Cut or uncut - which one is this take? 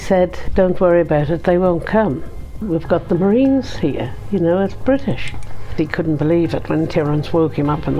cut